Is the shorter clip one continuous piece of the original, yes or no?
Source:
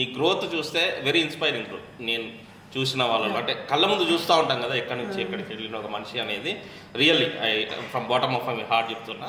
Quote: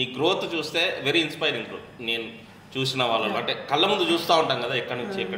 yes